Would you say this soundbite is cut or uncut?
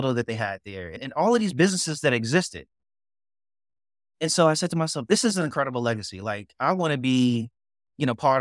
uncut